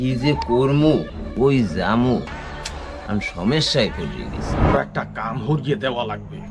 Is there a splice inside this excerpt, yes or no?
yes